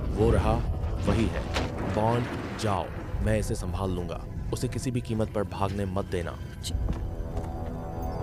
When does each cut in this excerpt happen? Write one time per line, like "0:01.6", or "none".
0:01.6
0:06.5